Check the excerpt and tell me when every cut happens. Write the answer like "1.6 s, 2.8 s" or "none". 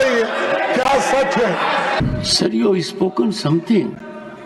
2.0 s

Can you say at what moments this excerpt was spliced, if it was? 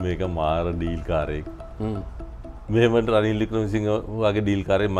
none

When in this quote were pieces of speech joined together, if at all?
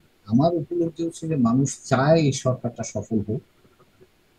none

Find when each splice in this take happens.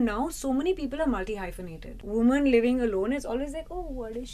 2.0 s

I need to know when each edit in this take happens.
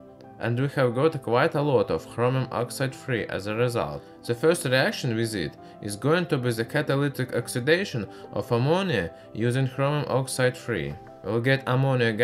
6.0 s

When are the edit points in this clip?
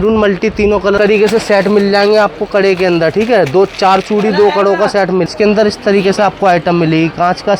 1.0 s, 5.3 s

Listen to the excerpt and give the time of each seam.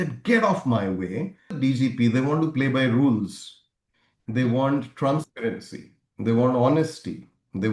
1.6 s

